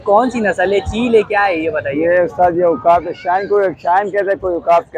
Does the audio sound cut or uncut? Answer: uncut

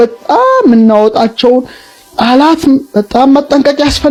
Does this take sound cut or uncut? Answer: uncut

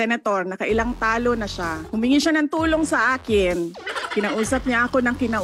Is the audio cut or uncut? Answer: cut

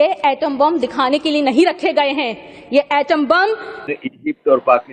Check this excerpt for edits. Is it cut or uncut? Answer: cut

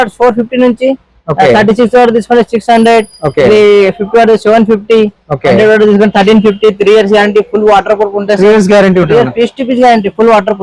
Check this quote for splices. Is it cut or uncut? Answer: uncut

